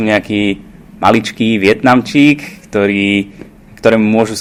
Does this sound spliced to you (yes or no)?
no